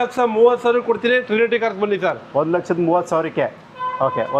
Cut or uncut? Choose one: uncut